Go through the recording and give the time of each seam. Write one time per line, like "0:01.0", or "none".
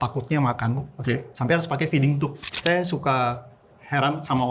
0:02.6